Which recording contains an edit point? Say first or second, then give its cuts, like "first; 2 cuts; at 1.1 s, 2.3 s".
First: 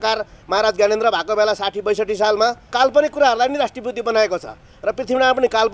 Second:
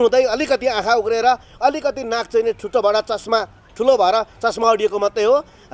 first; 1 cut; at 2.7 s